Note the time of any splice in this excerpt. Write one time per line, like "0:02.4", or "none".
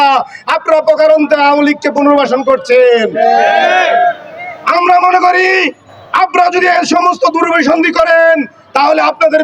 none